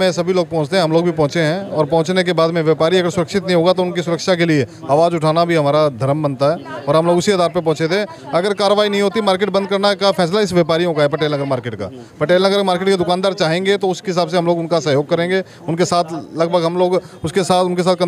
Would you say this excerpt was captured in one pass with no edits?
yes; 0 cuts

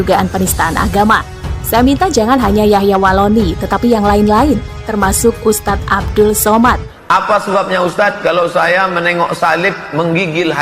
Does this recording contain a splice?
yes; 1 cut; at 6.9 s

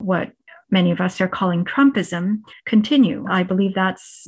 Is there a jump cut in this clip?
yes; 1 cut; at 3.2 s

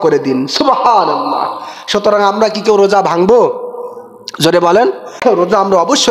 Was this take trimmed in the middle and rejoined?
yes; 1 cut; at 5.2 s

